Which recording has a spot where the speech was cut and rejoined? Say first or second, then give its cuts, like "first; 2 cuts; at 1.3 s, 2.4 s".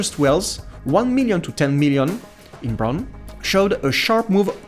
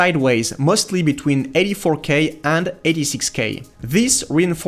second; 1 cut; at 3.6 s